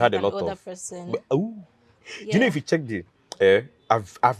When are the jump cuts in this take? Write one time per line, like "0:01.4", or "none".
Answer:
none